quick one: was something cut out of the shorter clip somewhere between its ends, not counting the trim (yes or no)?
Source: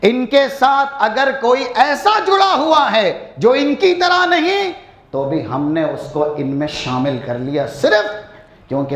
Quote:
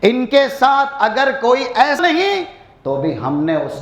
yes